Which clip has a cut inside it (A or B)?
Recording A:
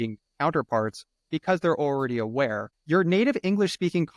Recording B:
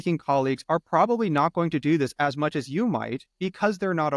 A